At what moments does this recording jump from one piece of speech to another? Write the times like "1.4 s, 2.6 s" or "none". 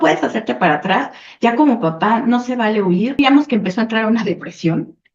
3.2 s